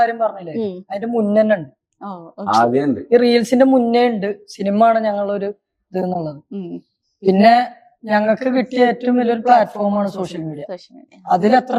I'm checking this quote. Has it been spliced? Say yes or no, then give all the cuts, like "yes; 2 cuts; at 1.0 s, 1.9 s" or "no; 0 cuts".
no; 0 cuts